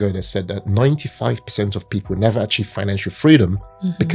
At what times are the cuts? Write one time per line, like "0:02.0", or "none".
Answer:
none